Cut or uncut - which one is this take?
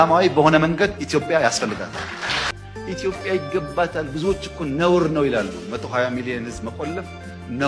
uncut